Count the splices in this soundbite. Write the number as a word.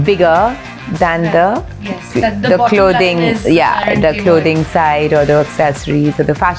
zero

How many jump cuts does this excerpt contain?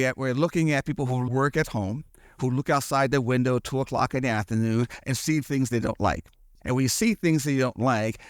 one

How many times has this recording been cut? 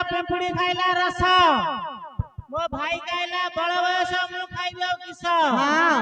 zero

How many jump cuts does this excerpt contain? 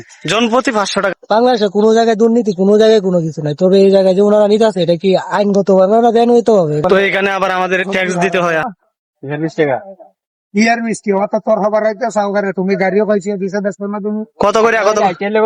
three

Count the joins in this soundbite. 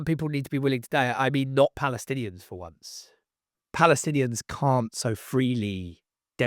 one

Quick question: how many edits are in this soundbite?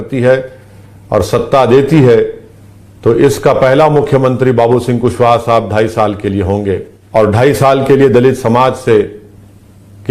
one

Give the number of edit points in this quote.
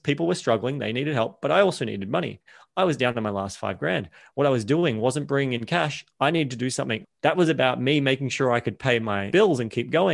one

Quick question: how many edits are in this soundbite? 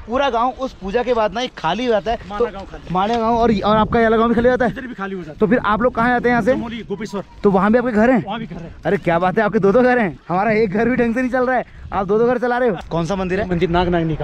zero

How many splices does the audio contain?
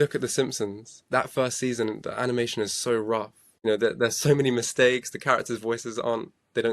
two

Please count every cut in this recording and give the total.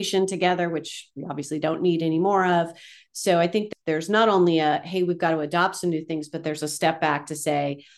one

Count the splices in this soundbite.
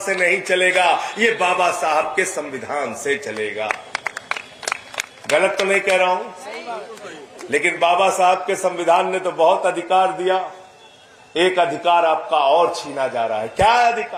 zero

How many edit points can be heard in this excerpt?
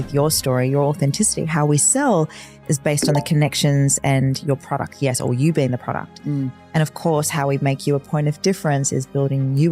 zero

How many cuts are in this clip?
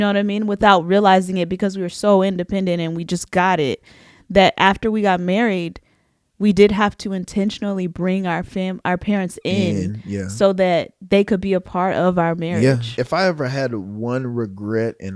one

